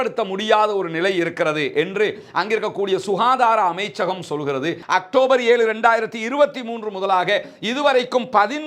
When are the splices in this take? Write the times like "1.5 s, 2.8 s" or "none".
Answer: 4.8 s